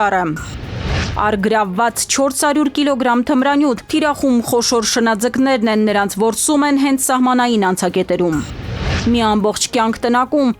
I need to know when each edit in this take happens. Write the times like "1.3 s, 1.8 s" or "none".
none